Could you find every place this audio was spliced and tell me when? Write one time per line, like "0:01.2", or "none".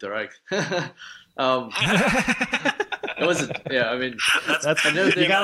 none